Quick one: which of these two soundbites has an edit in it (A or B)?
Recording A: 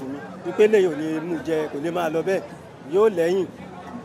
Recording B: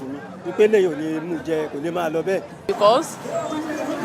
B